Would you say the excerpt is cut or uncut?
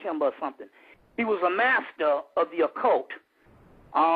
uncut